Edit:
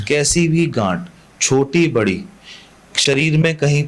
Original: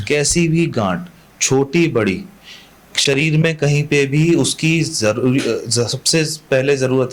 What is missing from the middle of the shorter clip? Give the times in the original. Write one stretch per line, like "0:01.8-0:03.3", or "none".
none

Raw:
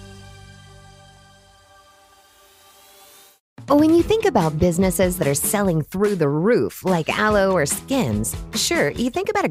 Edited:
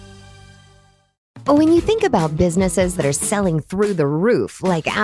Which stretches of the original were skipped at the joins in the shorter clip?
0:01.0-0:03.2

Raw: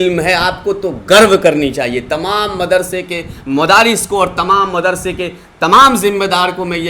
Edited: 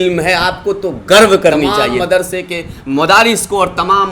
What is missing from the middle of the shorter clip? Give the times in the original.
0:01.9-0:02.5

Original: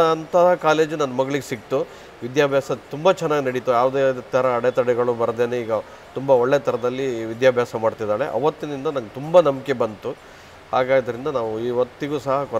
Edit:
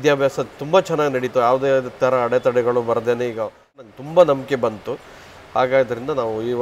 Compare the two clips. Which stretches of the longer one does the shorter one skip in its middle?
0:06.2-0:09.0

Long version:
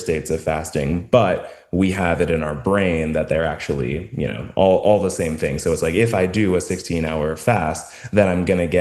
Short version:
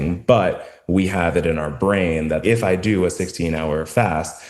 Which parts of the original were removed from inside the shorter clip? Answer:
0:03.3-0:05.9

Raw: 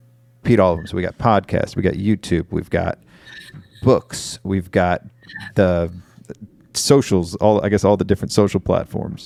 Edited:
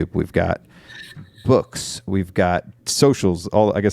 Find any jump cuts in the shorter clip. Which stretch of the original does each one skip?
0:05.2-0:06.7

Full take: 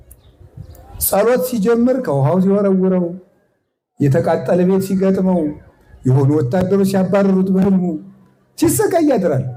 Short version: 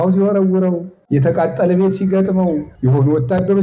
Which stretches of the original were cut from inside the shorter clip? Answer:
0:03.2-0:03.8
0:05.6-0:05.9

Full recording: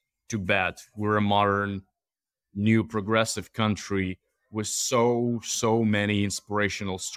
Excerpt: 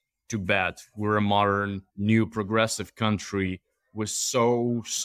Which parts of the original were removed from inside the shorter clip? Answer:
0:01.8-0:02.4

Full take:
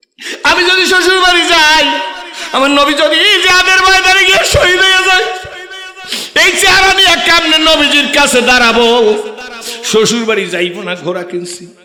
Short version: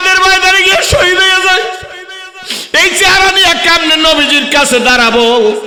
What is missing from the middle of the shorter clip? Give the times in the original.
none

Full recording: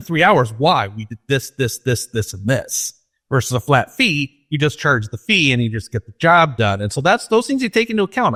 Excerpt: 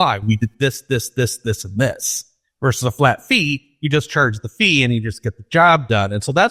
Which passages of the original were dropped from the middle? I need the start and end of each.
none

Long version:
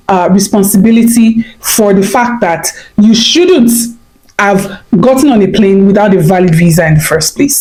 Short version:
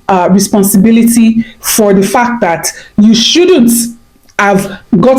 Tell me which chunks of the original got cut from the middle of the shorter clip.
none

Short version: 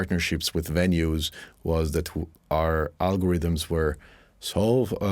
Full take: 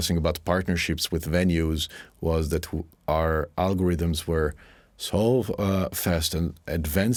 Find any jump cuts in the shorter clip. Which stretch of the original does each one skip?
none

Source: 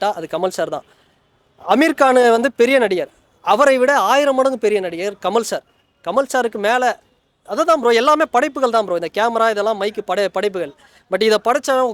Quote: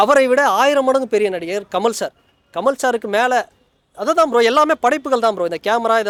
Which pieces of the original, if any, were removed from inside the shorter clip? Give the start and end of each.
none

